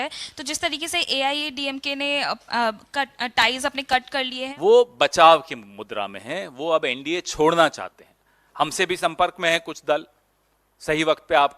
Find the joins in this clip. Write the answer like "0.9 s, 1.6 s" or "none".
4.4 s